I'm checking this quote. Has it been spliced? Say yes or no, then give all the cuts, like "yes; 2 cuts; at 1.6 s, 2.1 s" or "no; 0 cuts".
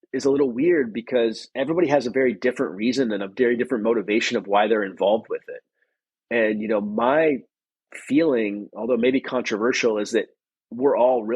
yes; 1 cut; at 1.5 s